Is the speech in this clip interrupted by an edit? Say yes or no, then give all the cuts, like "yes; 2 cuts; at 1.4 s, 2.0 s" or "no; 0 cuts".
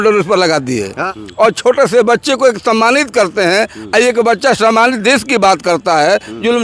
yes; 1 cut; at 1.2 s